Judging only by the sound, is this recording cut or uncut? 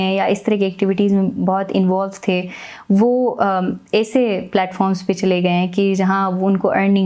uncut